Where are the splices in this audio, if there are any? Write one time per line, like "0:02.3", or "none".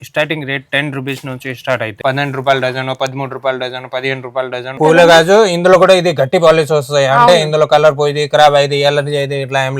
0:02.0
0:04.8